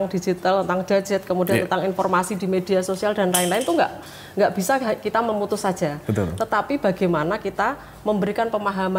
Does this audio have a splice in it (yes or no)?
no